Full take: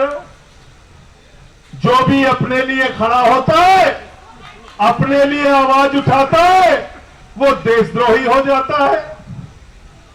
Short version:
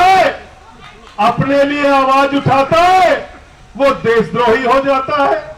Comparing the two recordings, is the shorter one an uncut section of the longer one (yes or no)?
yes